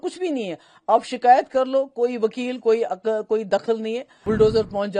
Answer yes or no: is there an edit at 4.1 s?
yes